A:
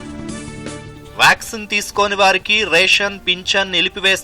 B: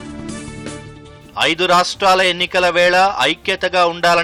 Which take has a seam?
A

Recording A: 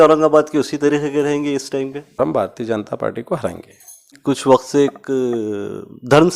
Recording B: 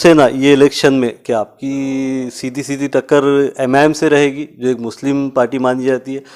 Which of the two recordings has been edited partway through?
A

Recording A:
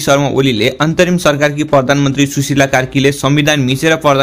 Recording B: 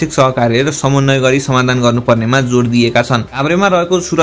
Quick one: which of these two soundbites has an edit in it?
B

